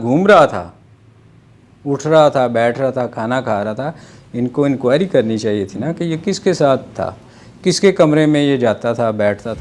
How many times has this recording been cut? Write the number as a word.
zero